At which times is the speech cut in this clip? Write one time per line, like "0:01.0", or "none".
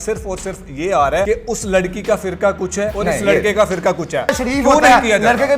0:01.3
0:02.9
0:04.4